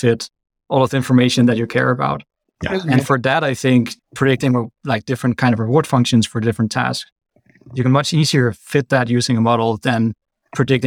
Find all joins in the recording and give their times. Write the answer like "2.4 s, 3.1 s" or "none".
none

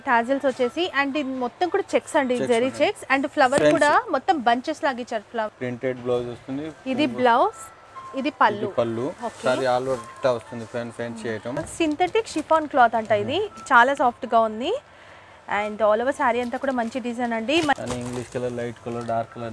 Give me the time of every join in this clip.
5.5 s, 11.6 s, 17.7 s

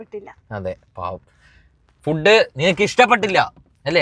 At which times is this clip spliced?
none

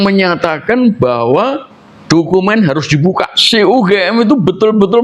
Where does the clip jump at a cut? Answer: 3.4 s

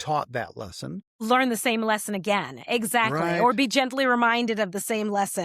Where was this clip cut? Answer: 1.2 s

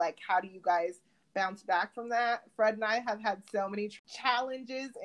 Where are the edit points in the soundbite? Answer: 3.9 s

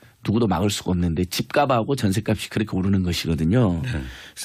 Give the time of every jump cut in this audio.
none

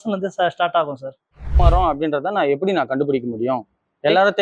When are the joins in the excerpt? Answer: 1.6 s

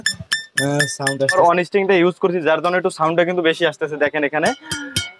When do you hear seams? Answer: 1.3 s

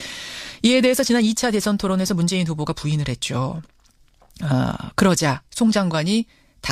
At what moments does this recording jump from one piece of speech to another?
2.5 s

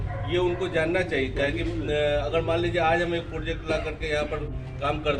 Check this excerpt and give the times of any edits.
none

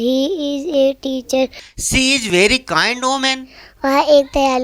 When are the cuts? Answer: 1.7 s

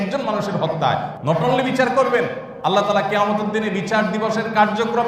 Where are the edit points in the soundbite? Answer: 1.1 s, 2.4 s

